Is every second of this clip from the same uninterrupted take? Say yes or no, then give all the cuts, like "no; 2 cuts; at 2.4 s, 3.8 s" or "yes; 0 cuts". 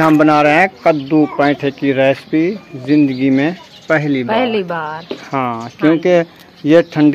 yes; 0 cuts